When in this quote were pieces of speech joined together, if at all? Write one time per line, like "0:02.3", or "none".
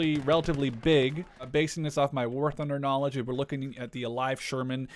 0:01.5